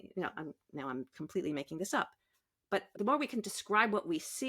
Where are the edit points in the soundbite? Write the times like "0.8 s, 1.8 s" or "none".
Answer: 2.9 s